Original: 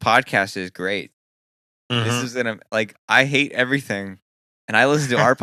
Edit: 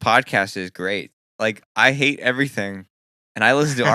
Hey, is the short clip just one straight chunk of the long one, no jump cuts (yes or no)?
no